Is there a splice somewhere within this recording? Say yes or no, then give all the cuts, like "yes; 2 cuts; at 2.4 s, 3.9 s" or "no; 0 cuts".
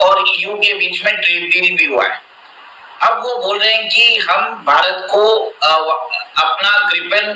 no; 0 cuts